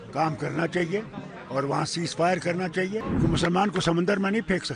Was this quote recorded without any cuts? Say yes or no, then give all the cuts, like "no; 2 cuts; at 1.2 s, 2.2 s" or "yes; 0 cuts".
no; 1 cut; at 3.1 s